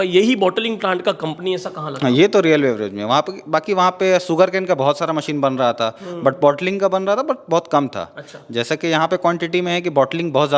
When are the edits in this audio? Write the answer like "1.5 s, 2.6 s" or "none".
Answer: none